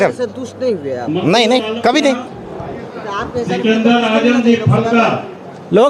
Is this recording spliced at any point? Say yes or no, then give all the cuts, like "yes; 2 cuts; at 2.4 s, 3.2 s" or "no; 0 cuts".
yes; 1 cut; at 2.3 s